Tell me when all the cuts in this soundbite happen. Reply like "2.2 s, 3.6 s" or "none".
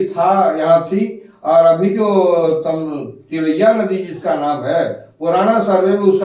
none

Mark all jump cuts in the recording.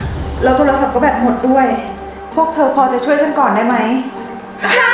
none

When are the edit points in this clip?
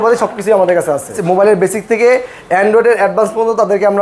1.3 s

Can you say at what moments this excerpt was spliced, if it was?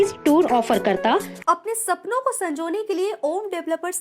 1.3 s

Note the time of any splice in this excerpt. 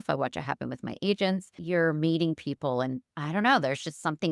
1.6 s

